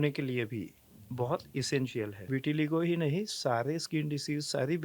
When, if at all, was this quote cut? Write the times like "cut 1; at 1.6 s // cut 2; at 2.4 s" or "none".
cut 1; at 2.2 s